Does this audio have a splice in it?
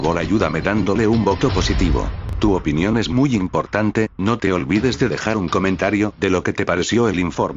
no; 0 cuts

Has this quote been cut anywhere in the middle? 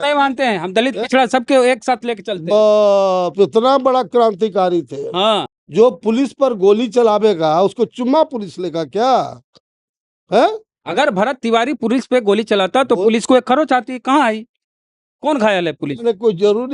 yes; 2 cuts; at 5.5 s, 10.8 s

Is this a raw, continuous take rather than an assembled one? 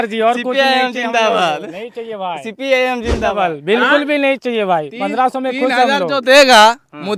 no; 1 cut; at 3.3 s

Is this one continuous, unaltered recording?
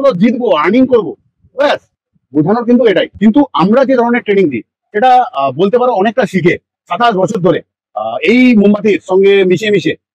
no; 1 cut; at 3.1 s

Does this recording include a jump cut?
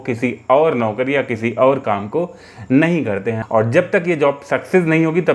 yes; 1 cut; at 3.4 s

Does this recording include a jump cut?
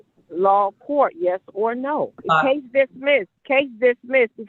yes; 2 cuts; at 2.2 s, 3.4 s

